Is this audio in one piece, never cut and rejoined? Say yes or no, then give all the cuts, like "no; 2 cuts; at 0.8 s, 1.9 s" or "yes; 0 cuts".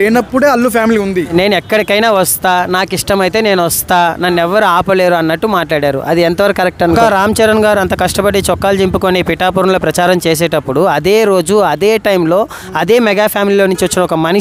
no; 2 cuts; at 1.3 s, 7.0 s